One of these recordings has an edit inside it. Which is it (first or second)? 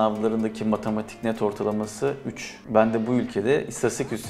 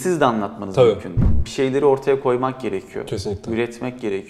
second